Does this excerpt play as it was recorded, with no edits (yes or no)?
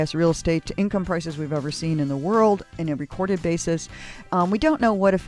no